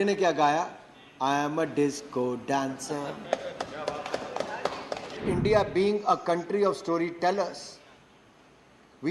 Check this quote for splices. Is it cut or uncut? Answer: cut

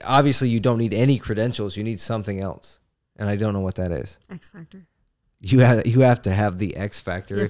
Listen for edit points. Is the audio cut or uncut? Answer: uncut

